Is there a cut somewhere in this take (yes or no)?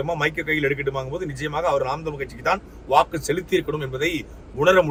no